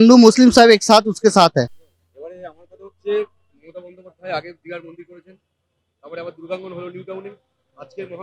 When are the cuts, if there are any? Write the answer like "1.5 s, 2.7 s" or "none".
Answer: none

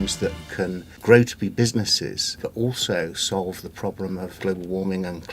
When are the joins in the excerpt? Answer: 0.9 s, 2.4 s, 4.3 s

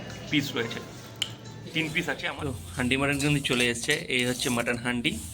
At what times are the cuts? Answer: 2.2 s

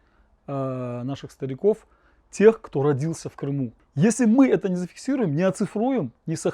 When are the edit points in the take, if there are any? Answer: 3.8 s

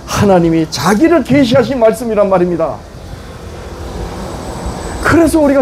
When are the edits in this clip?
none

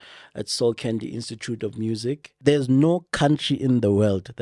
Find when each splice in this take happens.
2.3 s

